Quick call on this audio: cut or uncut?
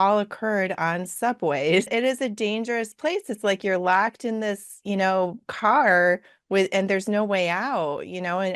cut